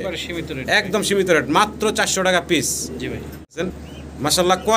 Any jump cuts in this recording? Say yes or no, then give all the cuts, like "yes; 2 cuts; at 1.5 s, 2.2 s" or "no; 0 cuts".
yes; 1 cut; at 3.6 s